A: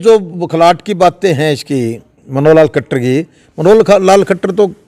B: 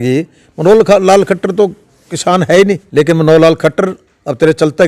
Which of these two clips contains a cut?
B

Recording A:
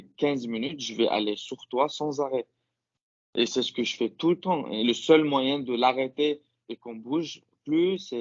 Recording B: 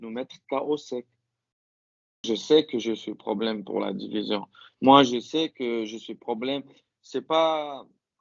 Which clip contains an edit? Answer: B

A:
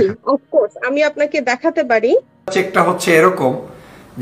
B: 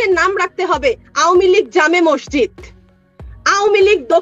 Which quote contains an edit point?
A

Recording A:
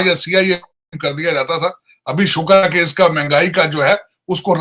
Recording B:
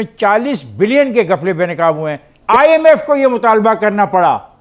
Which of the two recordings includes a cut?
B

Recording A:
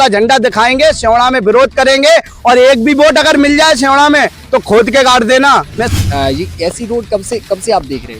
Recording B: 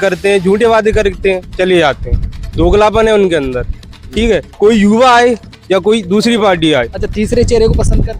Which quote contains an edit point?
A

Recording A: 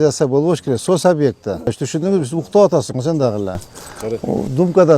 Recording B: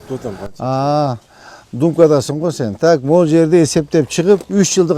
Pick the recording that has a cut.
A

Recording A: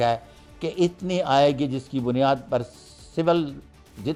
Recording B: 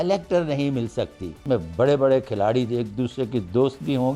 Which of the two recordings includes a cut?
B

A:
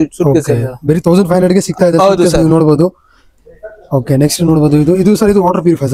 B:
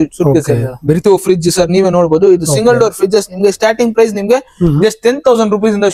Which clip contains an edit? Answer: B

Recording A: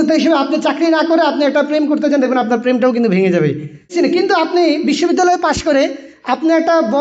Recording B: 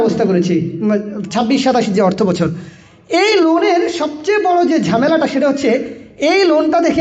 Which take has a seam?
A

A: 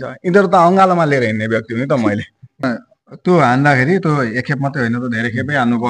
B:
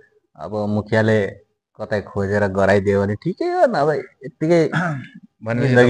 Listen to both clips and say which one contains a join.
A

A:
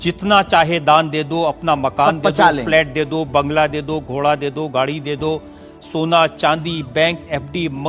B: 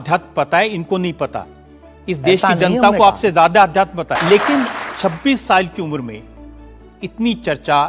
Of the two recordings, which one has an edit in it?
B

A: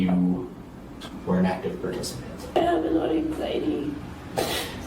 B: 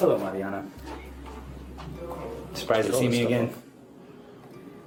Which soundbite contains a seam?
A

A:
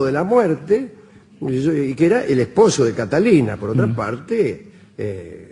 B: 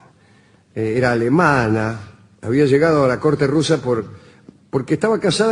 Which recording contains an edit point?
A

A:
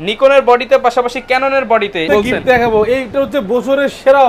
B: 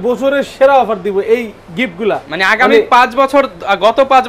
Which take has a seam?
A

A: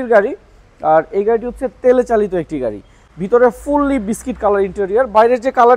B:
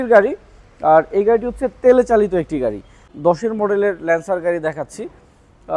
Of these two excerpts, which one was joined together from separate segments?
B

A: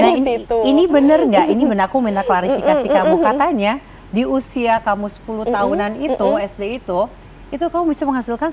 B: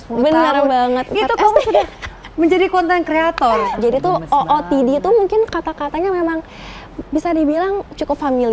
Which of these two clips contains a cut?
B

